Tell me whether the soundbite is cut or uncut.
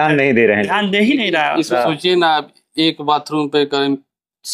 cut